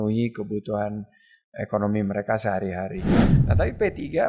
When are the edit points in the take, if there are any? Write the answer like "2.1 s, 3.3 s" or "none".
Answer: 3.2 s